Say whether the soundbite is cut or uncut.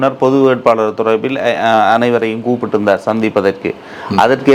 uncut